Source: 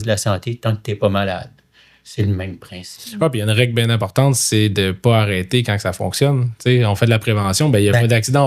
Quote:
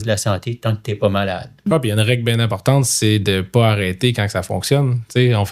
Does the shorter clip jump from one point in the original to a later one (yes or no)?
yes